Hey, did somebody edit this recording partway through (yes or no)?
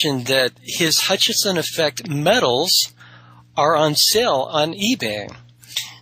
no